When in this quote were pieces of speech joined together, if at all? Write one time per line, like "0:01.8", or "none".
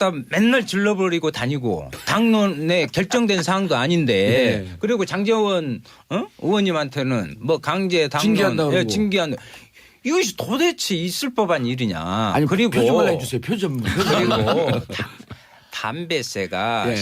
0:01.0